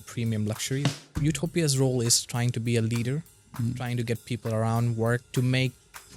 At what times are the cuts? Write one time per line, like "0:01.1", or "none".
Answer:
0:01.1
0:05.3